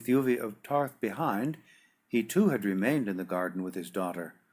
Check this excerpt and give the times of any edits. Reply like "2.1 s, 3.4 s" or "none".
2.9 s